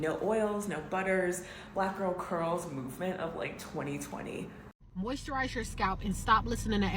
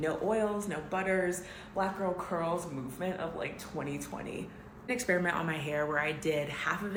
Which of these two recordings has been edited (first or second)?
first